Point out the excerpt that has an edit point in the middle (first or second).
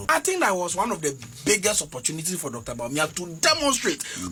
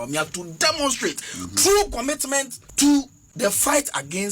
second